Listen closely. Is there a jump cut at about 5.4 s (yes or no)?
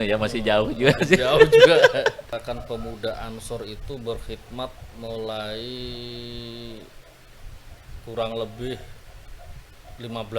no